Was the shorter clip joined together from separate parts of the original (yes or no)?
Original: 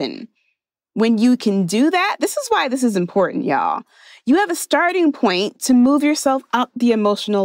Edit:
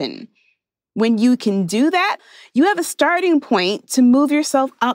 yes